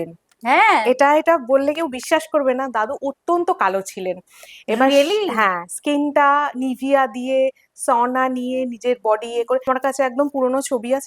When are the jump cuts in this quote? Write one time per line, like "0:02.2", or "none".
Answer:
0:09.6

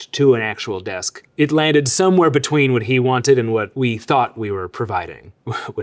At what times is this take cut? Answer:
0:03.7

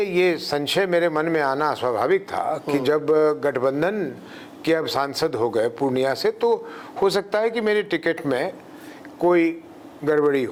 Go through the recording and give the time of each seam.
none

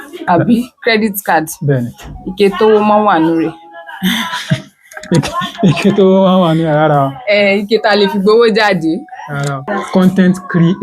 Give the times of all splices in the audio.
0:09.6

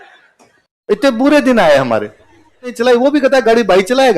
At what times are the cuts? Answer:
0:02.8

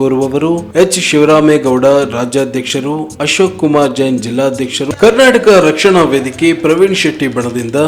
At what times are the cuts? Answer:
0:04.9

